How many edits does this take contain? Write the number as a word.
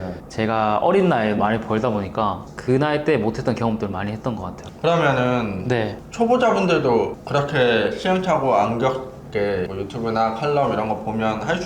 one